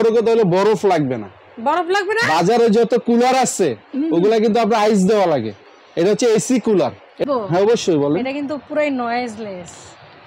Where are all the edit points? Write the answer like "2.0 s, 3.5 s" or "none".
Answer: 7.2 s